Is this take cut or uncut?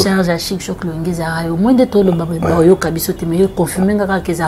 uncut